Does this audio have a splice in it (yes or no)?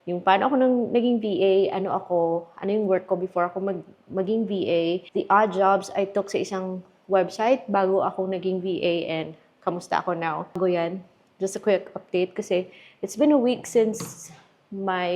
no